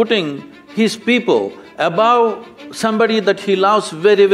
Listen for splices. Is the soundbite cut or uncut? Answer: uncut